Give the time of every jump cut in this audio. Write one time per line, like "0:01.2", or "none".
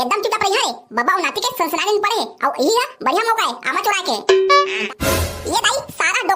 0:04.9